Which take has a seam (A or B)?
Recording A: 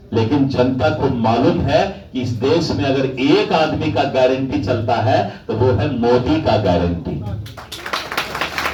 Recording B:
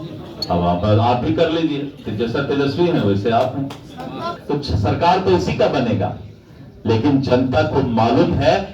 B